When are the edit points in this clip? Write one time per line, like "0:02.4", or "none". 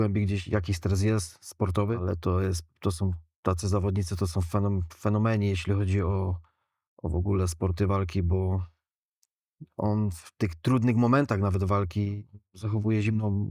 none